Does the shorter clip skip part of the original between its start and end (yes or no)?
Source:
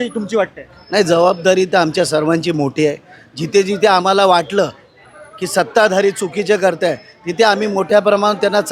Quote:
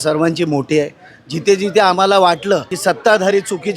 yes